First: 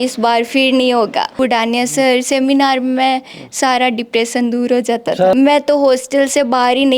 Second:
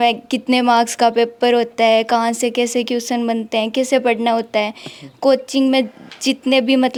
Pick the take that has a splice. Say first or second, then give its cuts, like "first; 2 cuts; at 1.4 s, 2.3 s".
first; 2 cuts; at 1.4 s, 5.3 s